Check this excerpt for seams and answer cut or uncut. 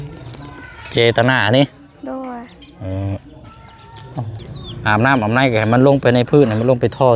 cut